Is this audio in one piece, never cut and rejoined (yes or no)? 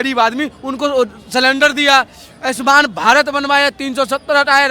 yes